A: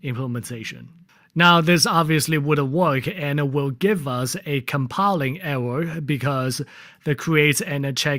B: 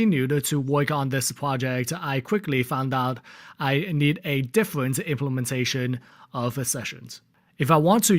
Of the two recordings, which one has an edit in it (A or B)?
B